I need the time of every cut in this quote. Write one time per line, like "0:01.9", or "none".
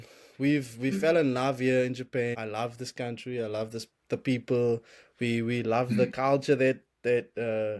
0:02.3